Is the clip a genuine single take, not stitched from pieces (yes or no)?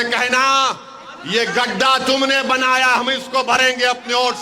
yes